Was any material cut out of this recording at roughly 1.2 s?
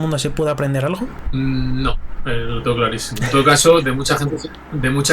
yes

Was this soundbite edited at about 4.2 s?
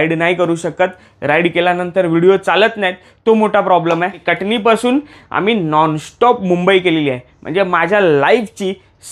yes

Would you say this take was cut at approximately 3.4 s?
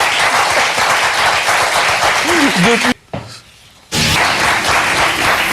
yes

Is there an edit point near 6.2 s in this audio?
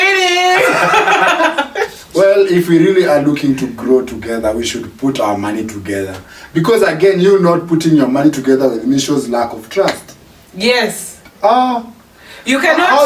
no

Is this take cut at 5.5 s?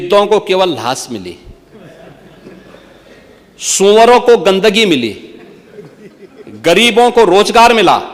no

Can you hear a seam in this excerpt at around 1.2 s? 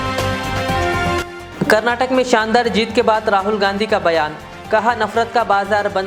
yes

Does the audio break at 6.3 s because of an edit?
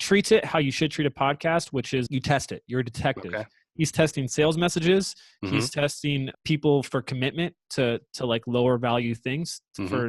yes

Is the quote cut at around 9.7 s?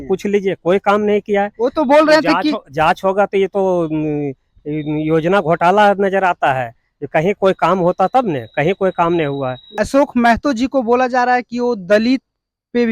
yes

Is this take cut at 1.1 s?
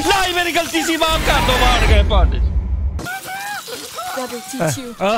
no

